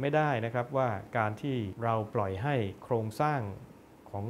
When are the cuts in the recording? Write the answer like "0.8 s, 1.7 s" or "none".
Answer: 1.7 s